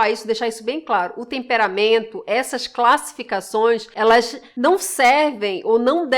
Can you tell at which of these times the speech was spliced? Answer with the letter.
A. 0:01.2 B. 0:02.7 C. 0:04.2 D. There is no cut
C